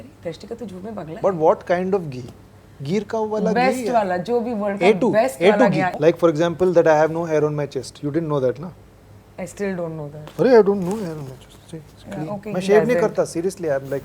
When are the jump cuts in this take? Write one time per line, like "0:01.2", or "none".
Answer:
0:05.9